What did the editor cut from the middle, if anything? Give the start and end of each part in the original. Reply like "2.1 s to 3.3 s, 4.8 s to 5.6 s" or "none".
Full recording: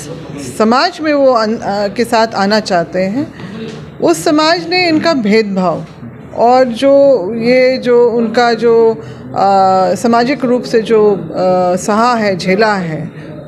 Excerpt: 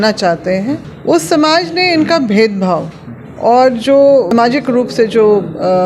3.4 s to 3.8 s, 7.2 s to 10.0 s